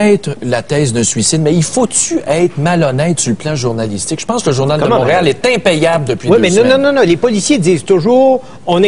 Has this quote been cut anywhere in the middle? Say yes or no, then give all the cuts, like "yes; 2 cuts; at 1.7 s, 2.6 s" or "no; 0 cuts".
yes; 1 cut; at 1.9 s